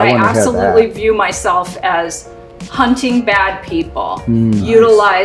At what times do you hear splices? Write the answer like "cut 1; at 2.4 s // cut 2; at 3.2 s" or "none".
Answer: none